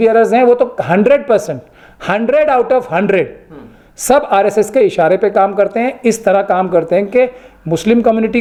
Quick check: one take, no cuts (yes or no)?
yes